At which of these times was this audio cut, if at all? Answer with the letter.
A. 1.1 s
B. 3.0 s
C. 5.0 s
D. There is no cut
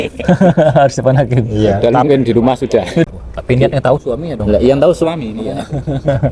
B